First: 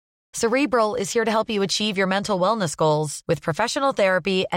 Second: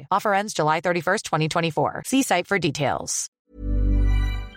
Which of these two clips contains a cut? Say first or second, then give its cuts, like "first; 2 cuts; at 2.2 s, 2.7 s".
second; 1 cut; at 3.4 s